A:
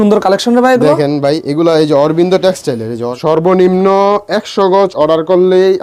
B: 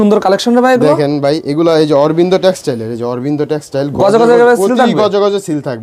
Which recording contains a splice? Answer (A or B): A